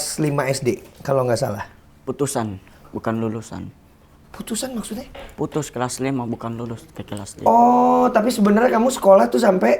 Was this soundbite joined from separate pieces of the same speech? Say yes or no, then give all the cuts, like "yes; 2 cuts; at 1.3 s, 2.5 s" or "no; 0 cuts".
no; 0 cuts